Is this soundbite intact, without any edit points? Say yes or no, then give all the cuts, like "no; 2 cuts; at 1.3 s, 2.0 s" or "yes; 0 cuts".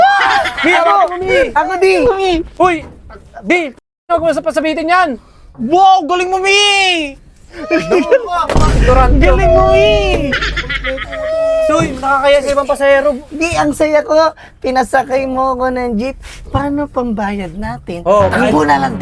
yes; 0 cuts